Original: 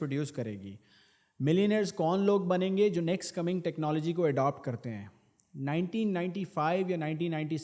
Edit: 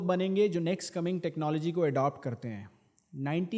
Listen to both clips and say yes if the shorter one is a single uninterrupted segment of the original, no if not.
yes